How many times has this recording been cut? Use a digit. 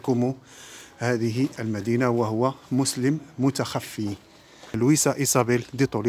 1